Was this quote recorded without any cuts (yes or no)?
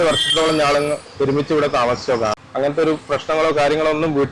no